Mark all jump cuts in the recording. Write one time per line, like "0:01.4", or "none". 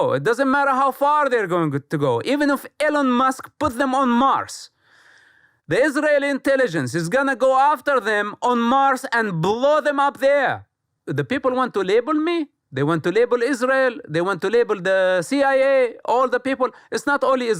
0:11.0

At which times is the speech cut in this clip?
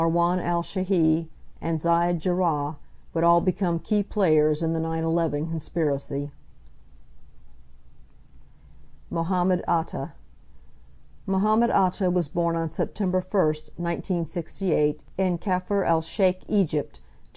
0:14.6

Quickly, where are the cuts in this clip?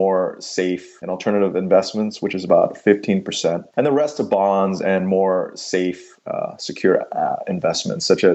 0:00.9

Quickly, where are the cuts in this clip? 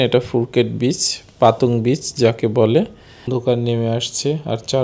0:03.3

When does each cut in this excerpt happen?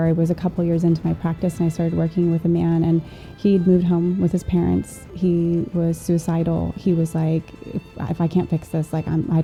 none

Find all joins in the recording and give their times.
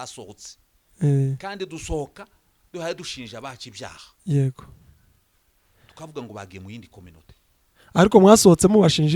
none

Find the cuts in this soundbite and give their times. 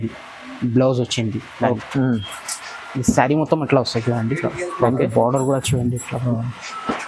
0:01.8

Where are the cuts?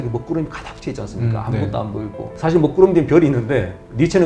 none

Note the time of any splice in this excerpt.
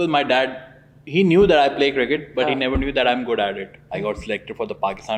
0:03.8

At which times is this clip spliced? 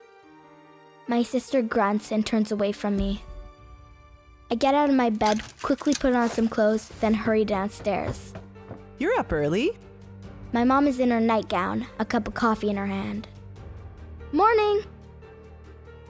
none

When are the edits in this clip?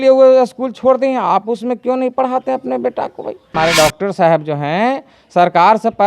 0:03.5

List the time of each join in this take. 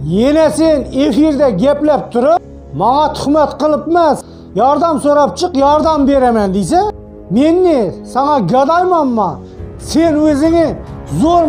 0:09.5

